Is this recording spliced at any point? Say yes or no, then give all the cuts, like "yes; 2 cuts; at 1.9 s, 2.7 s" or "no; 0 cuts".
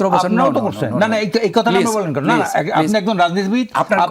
no; 0 cuts